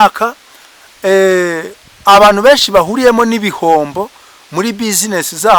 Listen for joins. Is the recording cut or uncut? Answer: uncut